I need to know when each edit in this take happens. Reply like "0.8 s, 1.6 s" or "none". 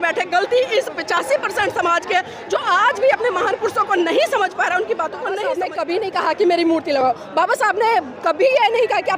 5.7 s

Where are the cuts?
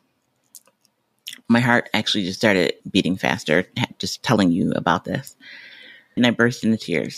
2.8 s, 6.2 s

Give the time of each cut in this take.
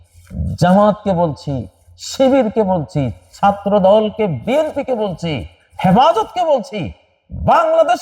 none

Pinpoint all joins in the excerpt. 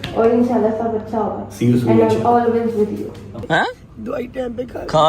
3.3 s

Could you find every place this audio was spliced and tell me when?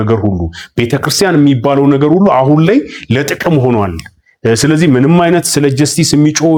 none

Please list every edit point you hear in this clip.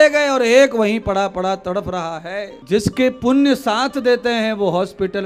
2.5 s

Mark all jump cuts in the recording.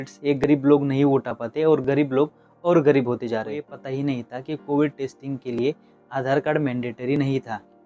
3.8 s

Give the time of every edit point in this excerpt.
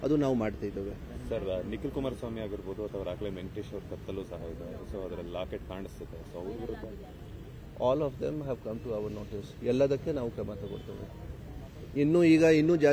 none

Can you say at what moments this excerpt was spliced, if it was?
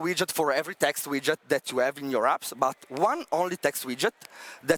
none

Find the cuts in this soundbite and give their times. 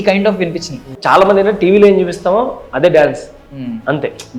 0.9 s

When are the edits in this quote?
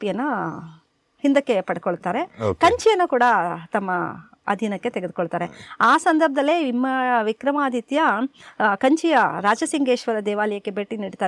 none

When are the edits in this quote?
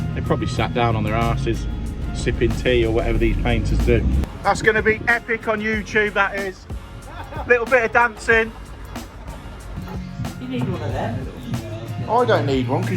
4.2 s, 9.8 s

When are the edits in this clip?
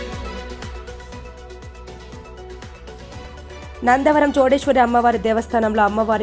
1.4 s

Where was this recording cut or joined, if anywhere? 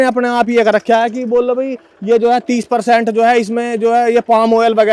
none

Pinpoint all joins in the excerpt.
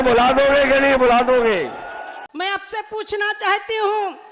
2.1 s

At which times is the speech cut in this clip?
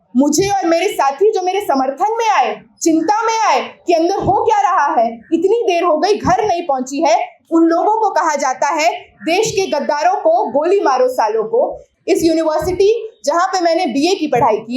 11.9 s

